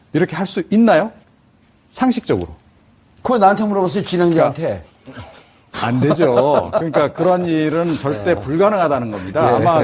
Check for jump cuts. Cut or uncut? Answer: cut